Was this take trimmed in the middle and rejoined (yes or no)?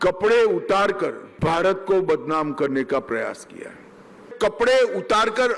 yes